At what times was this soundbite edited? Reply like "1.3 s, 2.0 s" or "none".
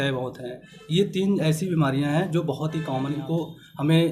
3.2 s